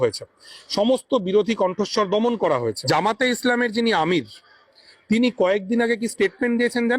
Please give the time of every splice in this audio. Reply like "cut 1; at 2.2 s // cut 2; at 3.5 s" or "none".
cut 1; at 2.8 s